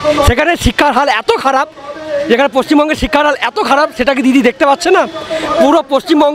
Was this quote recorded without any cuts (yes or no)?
yes